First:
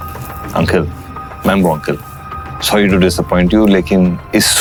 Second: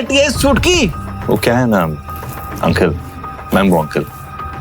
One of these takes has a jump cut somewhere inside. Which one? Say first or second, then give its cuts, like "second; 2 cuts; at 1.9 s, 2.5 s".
second; 1 cut; at 1.1 s